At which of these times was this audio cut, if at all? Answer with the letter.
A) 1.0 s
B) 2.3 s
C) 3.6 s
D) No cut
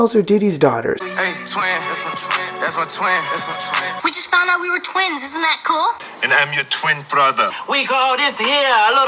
A